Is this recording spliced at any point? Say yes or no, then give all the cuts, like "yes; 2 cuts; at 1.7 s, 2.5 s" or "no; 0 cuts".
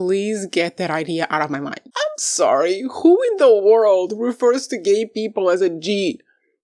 yes; 1 cut; at 1.8 s